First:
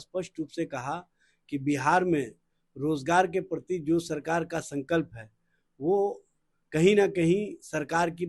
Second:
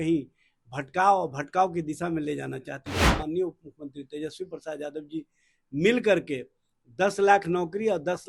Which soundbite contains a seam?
second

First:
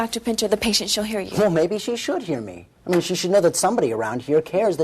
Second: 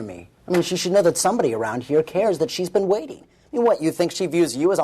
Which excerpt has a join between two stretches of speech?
first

